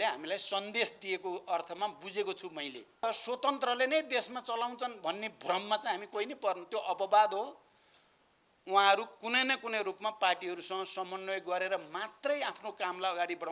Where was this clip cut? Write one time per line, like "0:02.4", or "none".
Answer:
0:03.0